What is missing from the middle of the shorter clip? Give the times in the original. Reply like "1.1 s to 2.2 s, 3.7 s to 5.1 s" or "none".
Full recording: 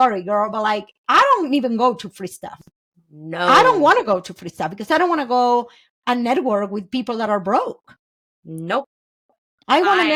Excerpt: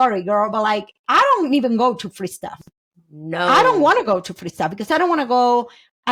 none